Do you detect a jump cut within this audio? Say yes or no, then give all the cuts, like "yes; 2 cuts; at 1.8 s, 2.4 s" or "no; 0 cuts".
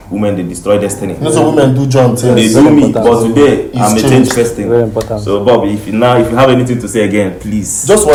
no; 0 cuts